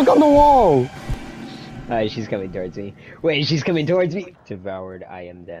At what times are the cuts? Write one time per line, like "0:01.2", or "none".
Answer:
0:04.3